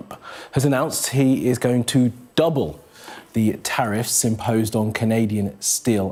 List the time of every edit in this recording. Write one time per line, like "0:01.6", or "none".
none